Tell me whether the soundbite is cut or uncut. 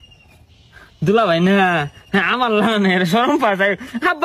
uncut